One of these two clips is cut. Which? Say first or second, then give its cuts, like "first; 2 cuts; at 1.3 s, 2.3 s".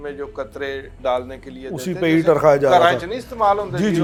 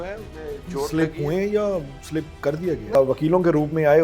second; 1 cut; at 2.9 s